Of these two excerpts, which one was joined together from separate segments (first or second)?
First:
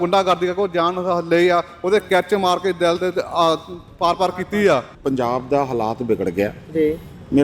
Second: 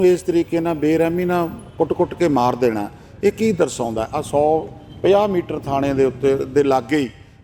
first